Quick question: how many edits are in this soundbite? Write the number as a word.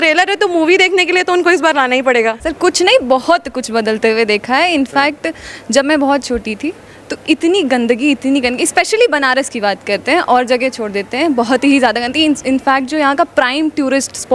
one